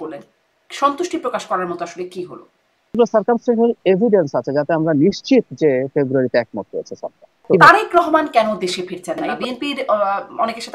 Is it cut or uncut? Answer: cut